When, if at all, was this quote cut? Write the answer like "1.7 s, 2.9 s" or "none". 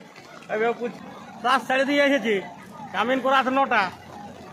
0.9 s